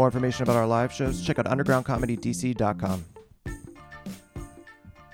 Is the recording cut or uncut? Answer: cut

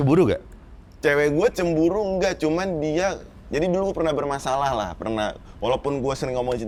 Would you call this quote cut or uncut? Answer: uncut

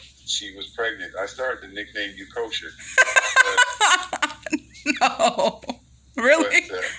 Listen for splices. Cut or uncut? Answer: uncut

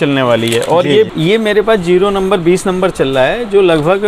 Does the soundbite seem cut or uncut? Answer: cut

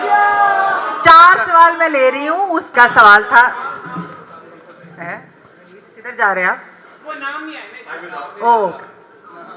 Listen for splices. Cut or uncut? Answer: cut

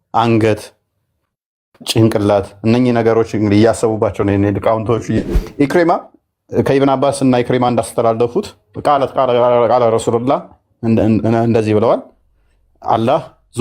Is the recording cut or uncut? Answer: cut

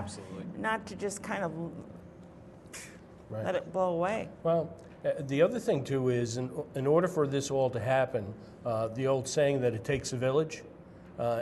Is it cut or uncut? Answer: uncut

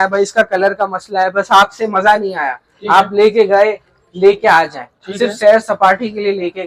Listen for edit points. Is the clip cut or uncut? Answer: uncut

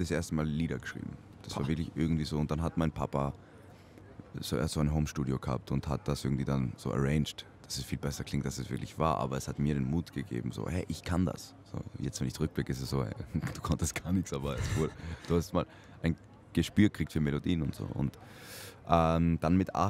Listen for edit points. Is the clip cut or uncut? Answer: uncut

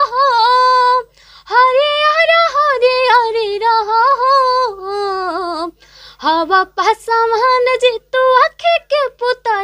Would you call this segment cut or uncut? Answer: uncut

